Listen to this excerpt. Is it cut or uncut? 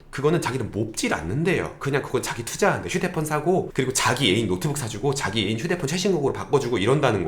cut